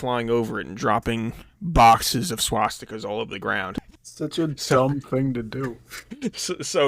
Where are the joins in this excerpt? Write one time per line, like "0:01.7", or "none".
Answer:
0:03.7